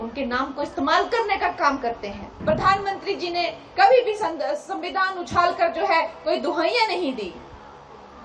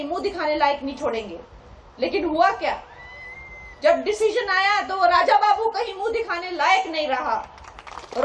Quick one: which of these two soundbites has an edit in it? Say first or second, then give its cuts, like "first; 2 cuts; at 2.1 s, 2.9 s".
first; 1 cut; at 2.3 s